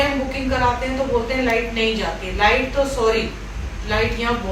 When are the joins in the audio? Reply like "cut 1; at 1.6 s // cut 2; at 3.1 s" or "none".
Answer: none